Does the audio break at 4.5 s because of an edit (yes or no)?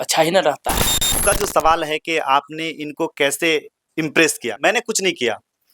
yes